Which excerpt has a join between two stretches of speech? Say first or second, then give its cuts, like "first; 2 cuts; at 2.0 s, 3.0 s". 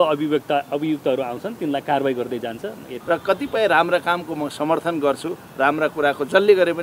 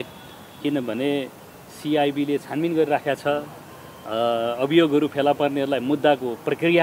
first; 1 cut; at 2.9 s